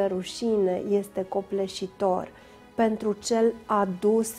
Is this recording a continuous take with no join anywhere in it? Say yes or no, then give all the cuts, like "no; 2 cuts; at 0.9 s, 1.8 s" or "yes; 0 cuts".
yes; 0 cuts